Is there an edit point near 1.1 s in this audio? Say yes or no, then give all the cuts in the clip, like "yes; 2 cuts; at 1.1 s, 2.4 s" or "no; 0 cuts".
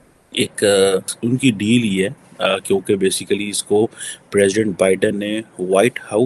yes; 1 cut; at 1.1 s